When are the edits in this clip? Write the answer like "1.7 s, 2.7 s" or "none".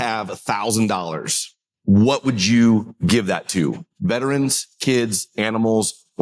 none